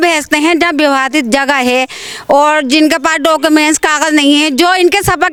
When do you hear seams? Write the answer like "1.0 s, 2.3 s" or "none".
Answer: none